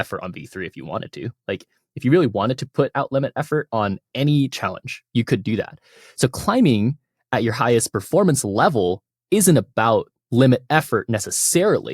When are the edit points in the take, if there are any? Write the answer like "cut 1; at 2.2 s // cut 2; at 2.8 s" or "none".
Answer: none